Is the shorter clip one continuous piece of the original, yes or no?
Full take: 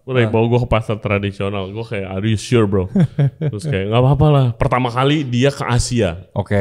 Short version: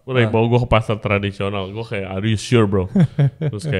yes